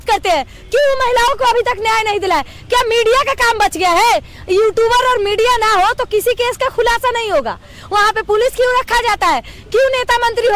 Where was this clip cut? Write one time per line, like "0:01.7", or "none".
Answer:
none